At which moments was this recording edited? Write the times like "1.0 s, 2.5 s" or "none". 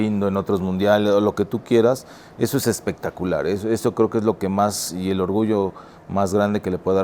none